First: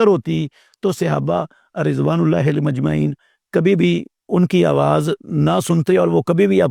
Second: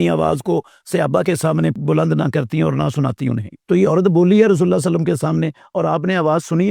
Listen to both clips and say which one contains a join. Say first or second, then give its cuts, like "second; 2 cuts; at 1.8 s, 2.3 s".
second; 2 cuts; at 1.8 s, 3.5 s